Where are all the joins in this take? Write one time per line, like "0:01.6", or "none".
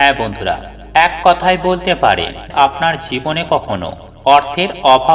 0:02.5

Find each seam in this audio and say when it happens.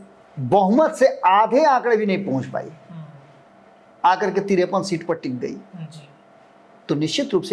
none

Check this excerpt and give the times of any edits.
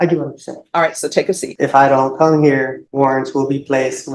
0:01.5
0:02.8

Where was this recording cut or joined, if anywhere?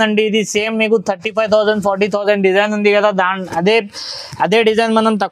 none

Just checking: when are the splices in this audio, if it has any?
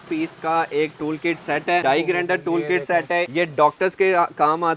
0:01.8
0:03.3

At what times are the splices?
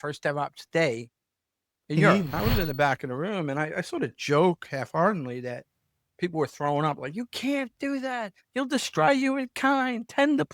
0:02.3

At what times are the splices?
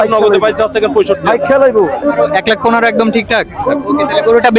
0:02.0

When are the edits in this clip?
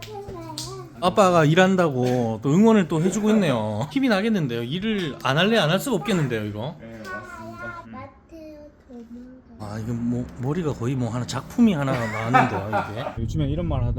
0:00.9
0:07.9
0:09.6
0:13.2

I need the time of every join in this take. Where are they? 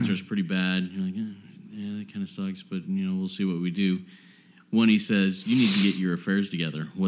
none

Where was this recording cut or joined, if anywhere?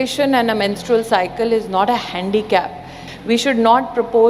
0:03.0

